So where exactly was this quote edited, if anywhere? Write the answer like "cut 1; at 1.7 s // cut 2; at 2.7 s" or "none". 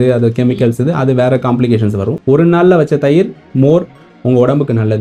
cut 1; at 2.1 s